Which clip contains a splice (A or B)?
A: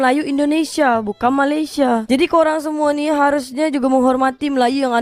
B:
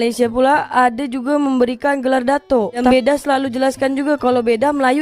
B